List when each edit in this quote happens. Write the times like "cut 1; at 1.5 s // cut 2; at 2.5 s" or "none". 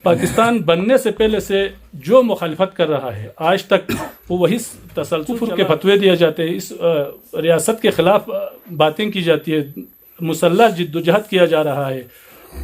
cut 1; at 5.3 s